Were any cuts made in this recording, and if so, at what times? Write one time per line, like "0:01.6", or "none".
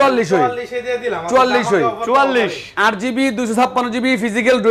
none

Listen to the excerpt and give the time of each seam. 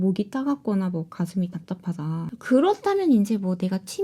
none

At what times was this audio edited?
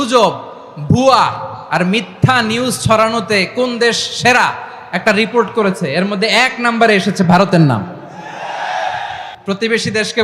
0:09.3

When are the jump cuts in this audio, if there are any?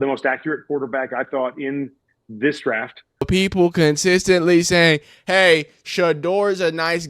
0:03.3

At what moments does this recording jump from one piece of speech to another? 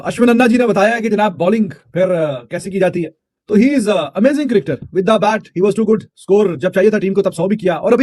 none

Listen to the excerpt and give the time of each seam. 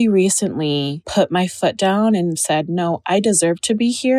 0:01.0
0:02.4

